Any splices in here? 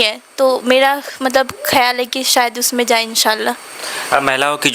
no; 0 cuts

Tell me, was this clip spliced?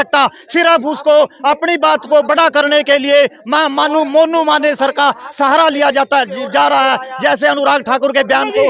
no; 0 cuts

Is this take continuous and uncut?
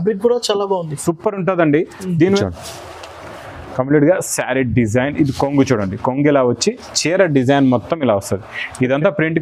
no; 1 cut; at 2.4 s

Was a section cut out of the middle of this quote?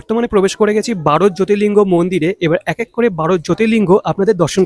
no; 0 cuts

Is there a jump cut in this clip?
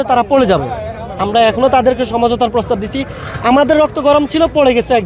no; 0 cuts

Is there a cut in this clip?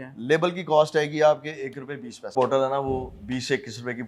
yes; 1 cut; at 2.3 s

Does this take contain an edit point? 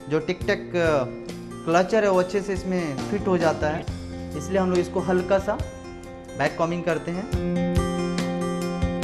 no; 0 cuts

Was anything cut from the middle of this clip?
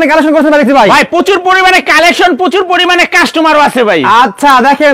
no; 0 cuts

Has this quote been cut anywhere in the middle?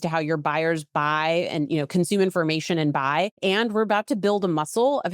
yes; 1 cut; at 3.3 s

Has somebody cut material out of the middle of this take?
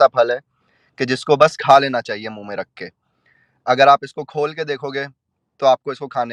no; 0 cuts

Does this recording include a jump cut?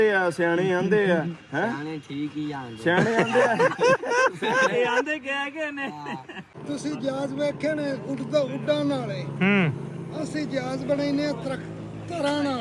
yes; 1 cut; at 6.6 s

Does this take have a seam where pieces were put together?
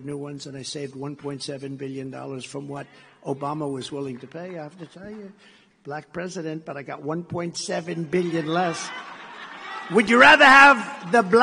yes; 2 cuts; at 2.2 s, 7.2 s

